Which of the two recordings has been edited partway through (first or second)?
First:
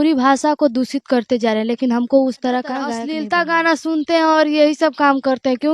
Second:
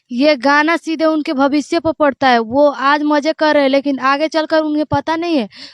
first